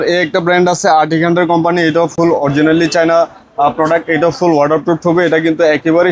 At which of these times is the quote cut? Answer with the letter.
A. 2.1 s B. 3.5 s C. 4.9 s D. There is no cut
D